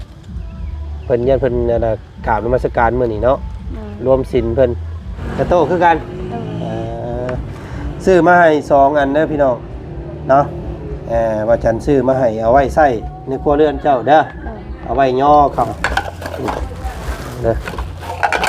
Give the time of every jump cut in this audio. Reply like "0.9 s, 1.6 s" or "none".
5.2 s, 15.7 s